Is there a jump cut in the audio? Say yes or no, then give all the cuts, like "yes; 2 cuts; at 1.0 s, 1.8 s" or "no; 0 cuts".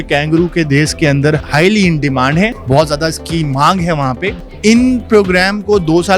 yes; 3 cuts; at 1.4 s, 2.6 s, 4.5 s